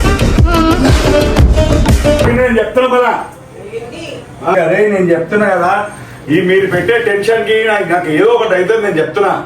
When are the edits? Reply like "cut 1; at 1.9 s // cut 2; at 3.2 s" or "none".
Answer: cut 1; at 4.5 s